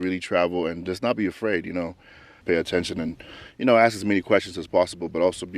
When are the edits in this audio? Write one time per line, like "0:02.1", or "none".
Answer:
0:02.3